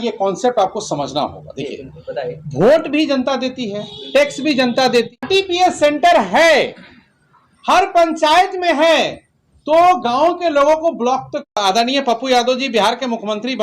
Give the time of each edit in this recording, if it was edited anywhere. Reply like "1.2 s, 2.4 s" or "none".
5.2 s, 11.6 s